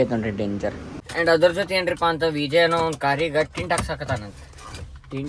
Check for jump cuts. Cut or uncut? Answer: cut